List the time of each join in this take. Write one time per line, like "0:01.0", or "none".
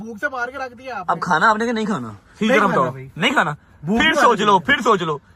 none